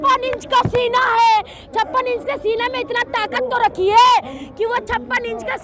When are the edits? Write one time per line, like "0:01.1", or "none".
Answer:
none